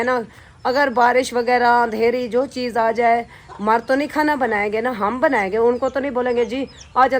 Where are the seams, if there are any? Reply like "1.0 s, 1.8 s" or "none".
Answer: none